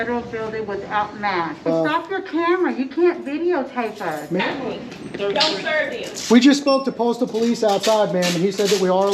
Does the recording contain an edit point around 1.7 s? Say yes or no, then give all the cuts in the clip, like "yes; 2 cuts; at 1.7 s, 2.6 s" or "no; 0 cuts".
yes; 2 cuts; at 1.7 s, 4.4 s